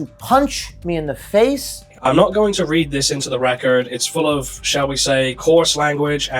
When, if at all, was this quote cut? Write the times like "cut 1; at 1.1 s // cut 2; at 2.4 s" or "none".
cut 1; at 1.9 s